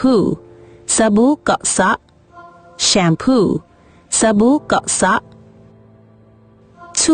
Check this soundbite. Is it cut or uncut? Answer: uncut